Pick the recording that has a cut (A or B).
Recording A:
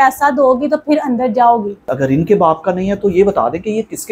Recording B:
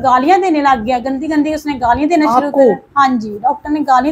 A